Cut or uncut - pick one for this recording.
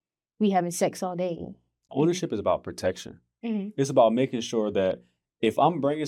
cut